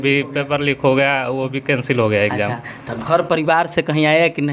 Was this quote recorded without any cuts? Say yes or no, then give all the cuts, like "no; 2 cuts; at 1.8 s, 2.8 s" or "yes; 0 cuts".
yes; 0 cuts